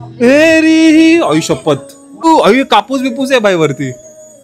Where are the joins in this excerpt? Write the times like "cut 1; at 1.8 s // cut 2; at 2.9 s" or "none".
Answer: none